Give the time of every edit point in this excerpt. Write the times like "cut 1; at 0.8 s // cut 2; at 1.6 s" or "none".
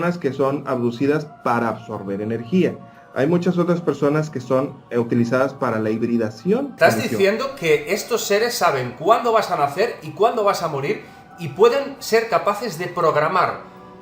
cut 1; at 6.7 s